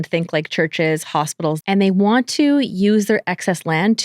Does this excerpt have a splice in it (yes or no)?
yes